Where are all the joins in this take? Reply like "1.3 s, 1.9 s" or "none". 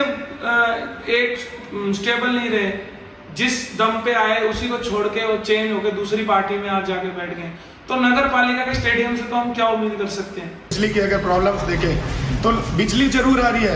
10.7 s